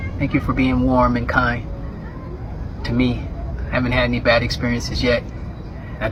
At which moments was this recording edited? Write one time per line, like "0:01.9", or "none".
none